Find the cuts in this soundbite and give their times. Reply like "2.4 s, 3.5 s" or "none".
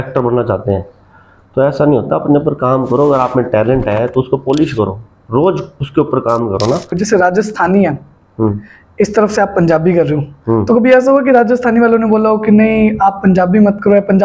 7.0 s